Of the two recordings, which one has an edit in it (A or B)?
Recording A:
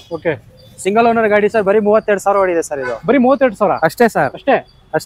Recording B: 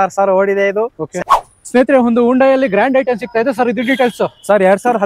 B